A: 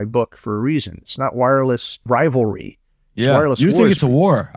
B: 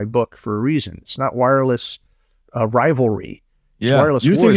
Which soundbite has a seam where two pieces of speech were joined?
A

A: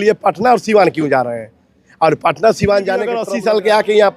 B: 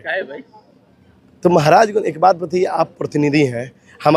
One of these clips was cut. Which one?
A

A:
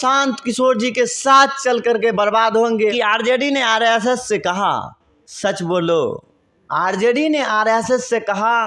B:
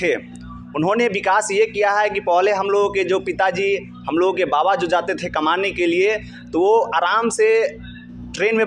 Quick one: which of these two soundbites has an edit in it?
A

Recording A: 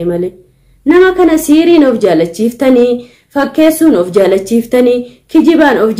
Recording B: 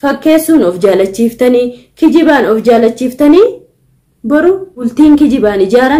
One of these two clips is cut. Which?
B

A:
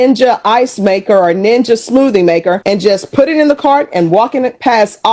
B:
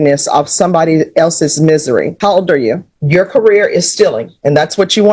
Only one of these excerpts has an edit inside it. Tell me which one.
B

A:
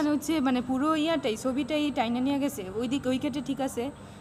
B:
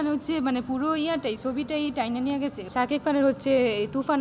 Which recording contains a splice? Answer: B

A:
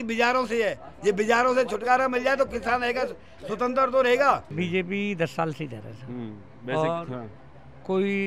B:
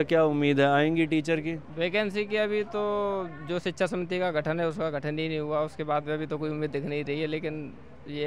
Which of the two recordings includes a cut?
A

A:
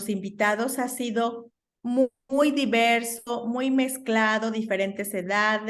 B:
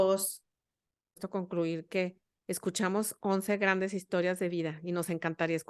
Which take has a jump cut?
B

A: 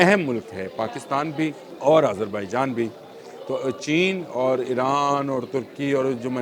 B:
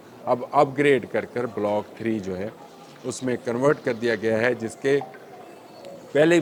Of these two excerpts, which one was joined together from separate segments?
A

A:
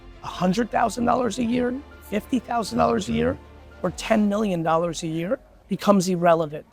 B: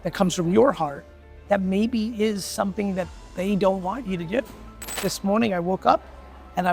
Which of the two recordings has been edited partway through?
B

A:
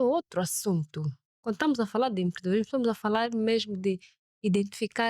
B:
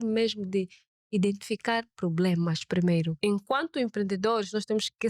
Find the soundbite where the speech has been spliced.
B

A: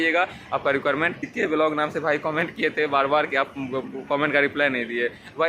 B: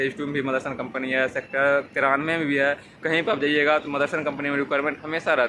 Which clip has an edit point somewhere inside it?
A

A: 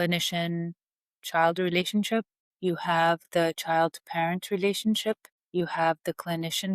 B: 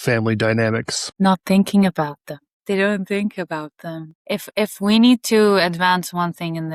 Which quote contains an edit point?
A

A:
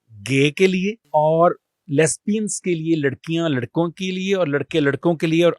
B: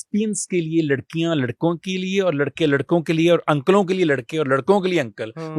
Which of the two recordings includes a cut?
A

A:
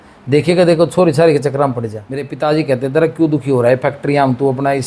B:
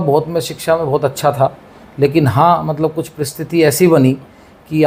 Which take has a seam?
A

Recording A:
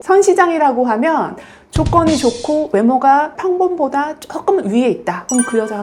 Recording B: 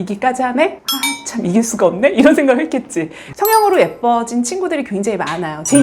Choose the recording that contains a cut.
B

